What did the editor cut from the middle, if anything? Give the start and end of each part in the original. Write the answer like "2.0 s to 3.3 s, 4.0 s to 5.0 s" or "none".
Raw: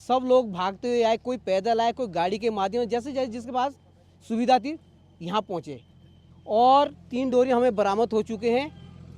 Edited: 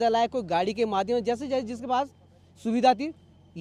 none